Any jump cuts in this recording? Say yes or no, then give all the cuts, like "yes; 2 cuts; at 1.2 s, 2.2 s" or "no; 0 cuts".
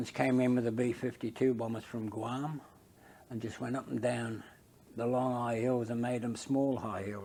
no; 0 cuts